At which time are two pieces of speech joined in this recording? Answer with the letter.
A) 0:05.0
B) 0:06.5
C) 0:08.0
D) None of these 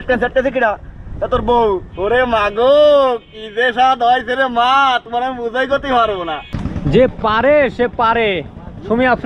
B